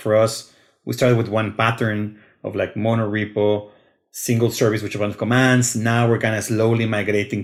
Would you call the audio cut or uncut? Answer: uncut